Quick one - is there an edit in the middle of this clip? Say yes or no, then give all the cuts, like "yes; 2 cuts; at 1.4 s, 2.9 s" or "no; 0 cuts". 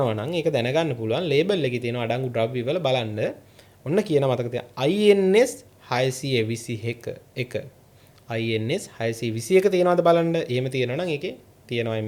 no; 0 cuts